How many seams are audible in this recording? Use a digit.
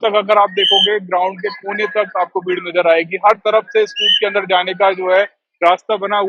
0